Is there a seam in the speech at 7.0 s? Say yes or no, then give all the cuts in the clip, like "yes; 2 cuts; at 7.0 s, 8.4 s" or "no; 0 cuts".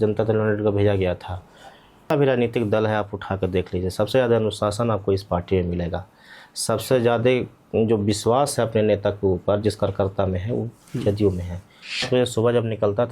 no; 2 cuts; at 2.1 s, 12.1 s